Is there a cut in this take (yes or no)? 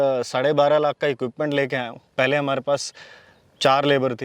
yes